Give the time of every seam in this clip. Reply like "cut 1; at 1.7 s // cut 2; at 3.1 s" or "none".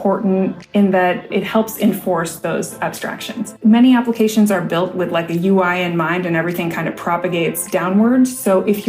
cut 1; at 3.6 s